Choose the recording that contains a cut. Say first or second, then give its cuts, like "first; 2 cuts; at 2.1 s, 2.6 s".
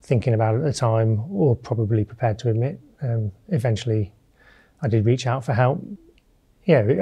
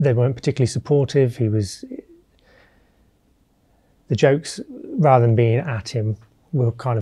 first; 1 cut; at 5.9 s